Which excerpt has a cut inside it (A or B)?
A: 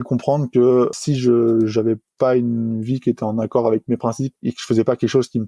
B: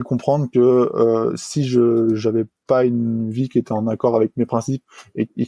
A